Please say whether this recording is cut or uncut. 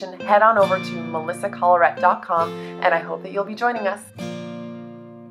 cut